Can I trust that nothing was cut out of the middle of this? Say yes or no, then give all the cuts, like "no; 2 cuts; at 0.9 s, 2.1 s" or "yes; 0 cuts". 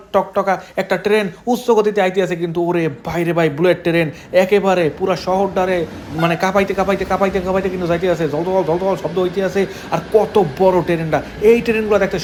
yes; 0 cuts